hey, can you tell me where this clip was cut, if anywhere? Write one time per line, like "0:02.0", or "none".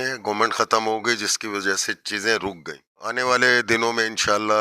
0:03.2